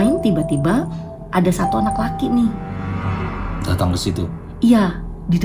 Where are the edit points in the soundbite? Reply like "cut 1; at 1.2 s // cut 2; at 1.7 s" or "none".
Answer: none